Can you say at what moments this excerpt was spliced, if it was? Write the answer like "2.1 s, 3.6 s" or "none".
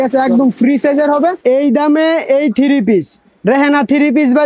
1.4 s